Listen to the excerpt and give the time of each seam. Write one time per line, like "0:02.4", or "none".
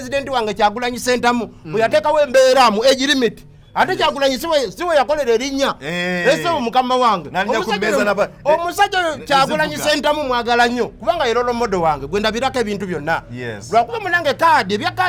none